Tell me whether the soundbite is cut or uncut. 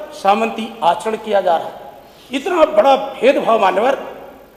uncut